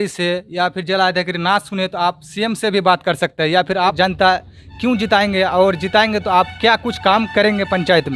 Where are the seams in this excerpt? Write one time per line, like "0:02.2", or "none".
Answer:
0:03.9